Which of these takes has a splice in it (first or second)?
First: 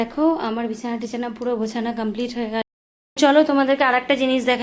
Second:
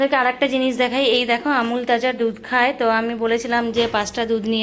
first